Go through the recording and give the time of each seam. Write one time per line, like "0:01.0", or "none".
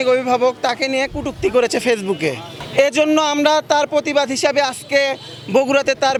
none